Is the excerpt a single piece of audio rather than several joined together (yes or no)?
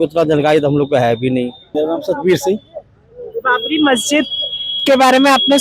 no